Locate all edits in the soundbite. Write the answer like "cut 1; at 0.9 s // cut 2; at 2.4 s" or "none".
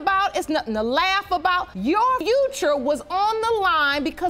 cut 1; at 2.2 s